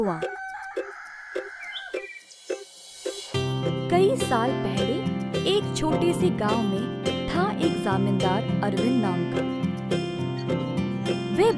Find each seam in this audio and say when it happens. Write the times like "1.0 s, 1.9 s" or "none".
1.0 s, 10.2 s